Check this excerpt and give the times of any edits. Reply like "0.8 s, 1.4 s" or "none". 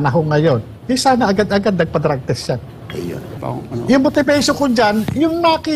3.3 s